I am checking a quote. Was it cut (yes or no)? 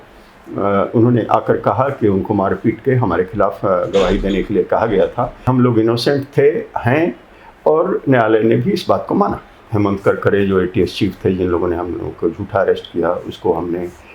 yes